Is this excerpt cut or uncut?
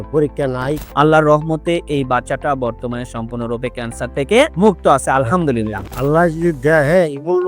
cut